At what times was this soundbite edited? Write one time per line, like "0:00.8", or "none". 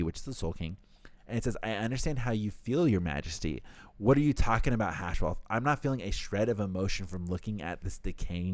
none